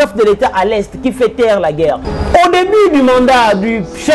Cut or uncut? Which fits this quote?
cut